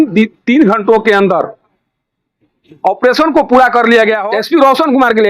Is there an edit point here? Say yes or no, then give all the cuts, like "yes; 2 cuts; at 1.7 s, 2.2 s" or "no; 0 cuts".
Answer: yes; 1 cut; at 4.2 s